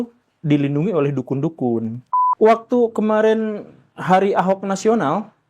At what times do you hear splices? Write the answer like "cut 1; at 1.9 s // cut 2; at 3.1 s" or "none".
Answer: cut 1; at 2.2 s